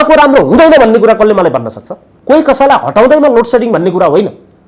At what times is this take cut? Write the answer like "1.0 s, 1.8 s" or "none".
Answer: 2.1 s